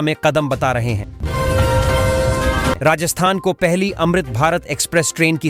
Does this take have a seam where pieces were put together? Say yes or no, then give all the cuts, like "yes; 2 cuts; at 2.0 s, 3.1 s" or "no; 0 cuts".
yes; 2 cuts; at 1.2 s, 2.8 s